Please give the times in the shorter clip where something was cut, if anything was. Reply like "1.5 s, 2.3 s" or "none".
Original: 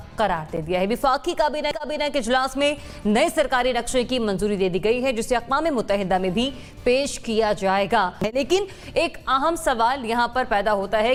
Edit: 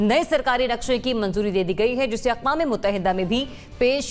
none